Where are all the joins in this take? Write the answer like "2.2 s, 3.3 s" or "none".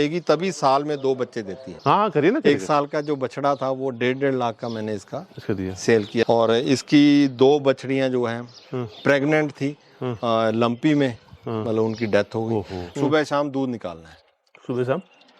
1.6 s, 6.2 s, 12.8 s